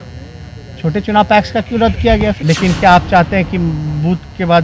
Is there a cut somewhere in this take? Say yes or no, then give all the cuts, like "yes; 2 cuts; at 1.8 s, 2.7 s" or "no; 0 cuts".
yes; 1 cut; at 2.4 s